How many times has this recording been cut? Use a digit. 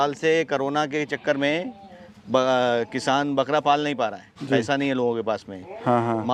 0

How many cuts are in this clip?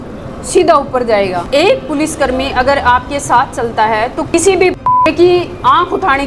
2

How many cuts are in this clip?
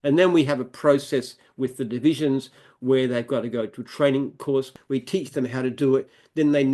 1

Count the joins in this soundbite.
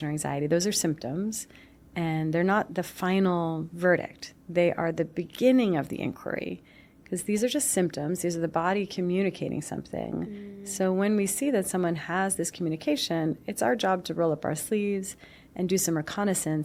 0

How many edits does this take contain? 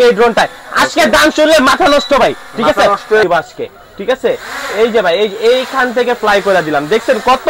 1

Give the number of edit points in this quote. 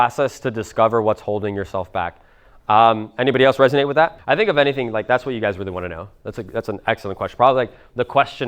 1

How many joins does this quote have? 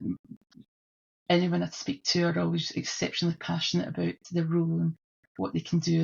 0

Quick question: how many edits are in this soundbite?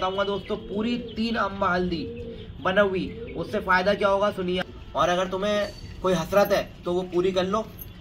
1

